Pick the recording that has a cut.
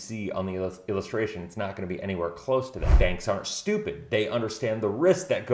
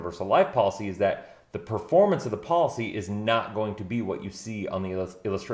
first; 1 cut; at 2.8 s

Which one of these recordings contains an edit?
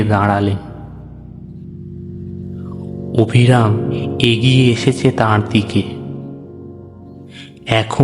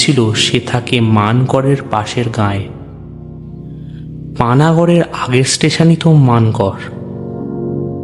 second; 3 cuts; at 2.6 s, 4.4 s, 7.3 s

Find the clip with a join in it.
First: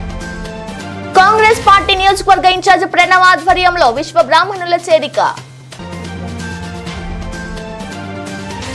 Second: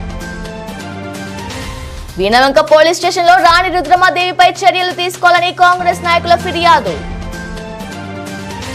second; 1 cut; at 1.1 s

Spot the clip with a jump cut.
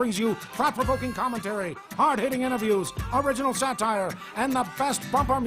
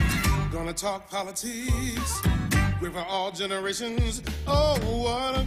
first; 3 cuts; at 1.8 s, 3.0 s, 4.2 s

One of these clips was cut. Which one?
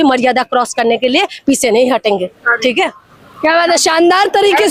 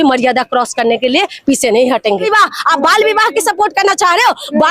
second; 1 cut; at 2.3 s

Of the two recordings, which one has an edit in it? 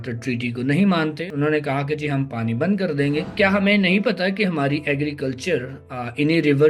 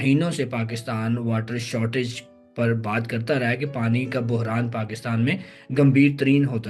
first; 2 cuts; at 1.2 s, 3.3 s

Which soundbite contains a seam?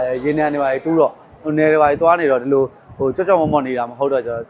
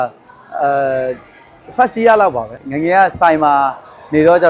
second; 1 cut; at 2.5 s

